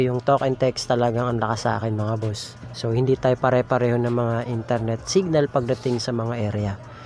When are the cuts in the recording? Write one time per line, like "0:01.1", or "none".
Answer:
0:02.6